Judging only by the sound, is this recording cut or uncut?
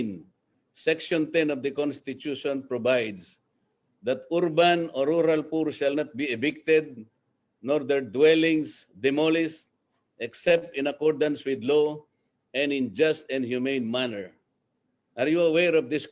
uncut